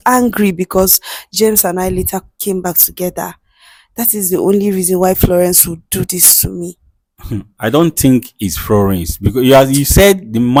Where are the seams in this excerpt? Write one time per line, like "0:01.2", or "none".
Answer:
none